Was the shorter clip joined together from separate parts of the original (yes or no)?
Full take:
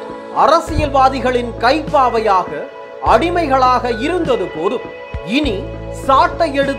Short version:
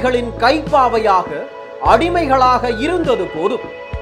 no